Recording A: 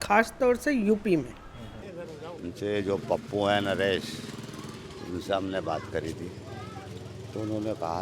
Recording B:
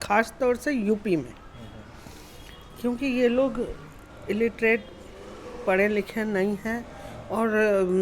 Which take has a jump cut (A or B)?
A